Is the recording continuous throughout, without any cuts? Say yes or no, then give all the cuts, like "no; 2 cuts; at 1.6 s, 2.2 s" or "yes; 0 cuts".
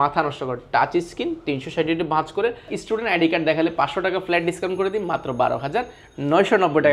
no; 1 cut; at 2.8 s